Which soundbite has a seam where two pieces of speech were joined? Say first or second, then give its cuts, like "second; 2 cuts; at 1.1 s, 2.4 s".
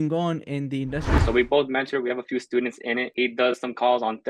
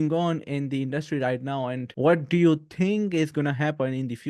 first; 2 cuts; at 1.1 s, 3.1 s